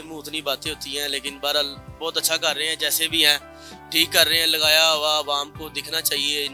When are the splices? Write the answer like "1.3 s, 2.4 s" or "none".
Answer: none